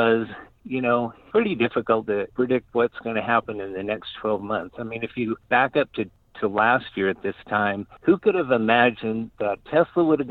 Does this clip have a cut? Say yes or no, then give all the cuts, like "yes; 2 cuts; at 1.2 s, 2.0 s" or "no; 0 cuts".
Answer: yes; 2 cuts; at 2.3 s, 7.9 s